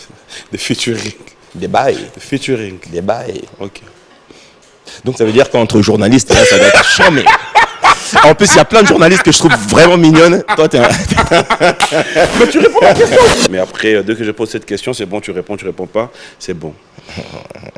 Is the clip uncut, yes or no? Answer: no